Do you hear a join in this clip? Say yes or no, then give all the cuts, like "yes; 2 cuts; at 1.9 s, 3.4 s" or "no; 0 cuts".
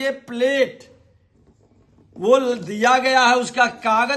no; 0 cuts